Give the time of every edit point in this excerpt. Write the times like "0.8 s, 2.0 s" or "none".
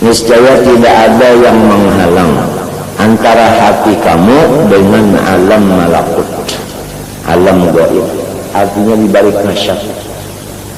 none

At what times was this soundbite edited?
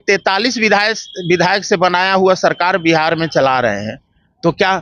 none

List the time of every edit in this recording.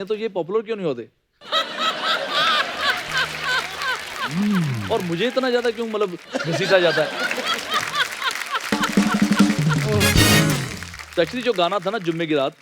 none

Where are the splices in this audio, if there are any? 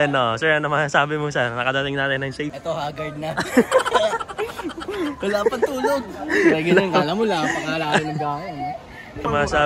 none

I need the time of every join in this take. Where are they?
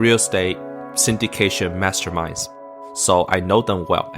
2.6 s

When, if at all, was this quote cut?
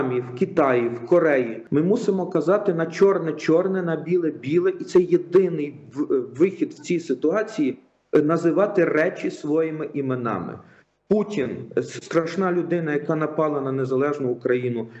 1.6 s

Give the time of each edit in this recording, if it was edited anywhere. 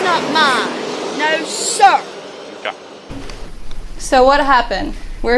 3.3 s

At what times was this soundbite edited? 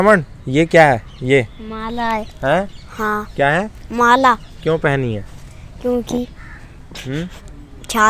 none

